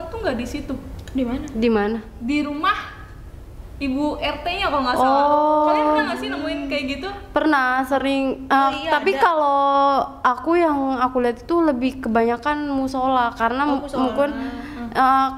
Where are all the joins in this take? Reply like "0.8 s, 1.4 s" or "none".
none